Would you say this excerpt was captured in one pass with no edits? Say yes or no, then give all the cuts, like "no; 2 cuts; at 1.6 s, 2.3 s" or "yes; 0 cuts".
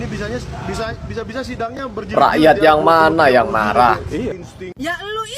no; 1 cut; at 4.3 s